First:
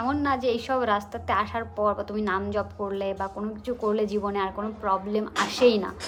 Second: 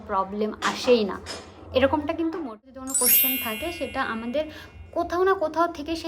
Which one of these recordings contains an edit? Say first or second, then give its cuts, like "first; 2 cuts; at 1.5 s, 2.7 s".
second; 1 cut; at 2.6 s